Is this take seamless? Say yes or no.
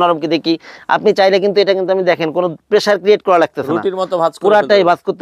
yes